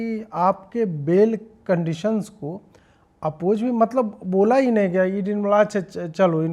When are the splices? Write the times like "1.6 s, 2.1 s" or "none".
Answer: none